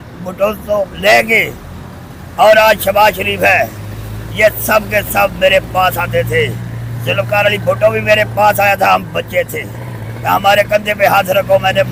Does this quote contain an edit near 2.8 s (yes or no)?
no